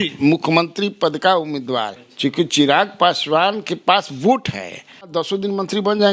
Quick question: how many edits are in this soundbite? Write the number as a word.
two